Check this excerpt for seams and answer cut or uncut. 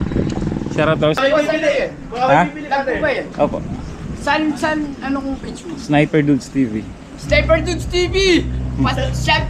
cut